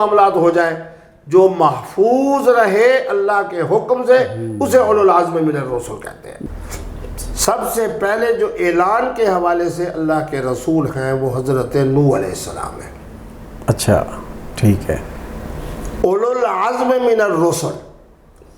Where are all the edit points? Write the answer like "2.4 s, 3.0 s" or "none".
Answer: 6.4 s